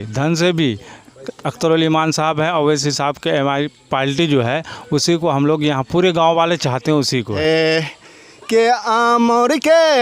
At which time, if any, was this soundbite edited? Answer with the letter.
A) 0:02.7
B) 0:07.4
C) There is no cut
B